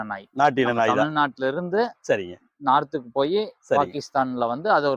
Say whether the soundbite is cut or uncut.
uncut